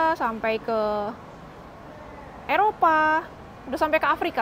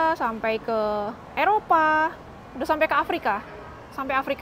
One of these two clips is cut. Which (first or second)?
second